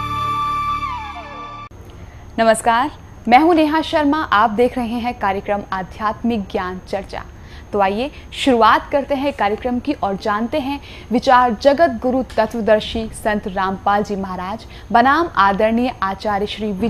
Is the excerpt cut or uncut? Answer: uncut